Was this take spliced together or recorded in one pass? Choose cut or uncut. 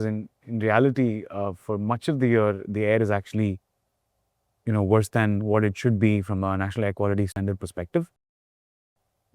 uncut